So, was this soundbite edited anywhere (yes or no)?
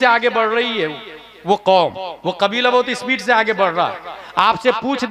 no